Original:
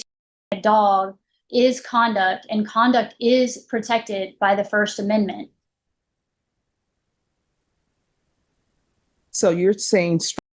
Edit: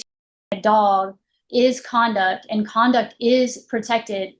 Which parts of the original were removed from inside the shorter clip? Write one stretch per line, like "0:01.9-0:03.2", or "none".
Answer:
none